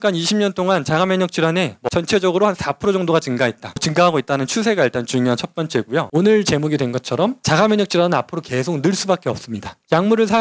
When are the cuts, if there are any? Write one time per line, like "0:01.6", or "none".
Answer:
0:01.8
0:03.9
0:06.1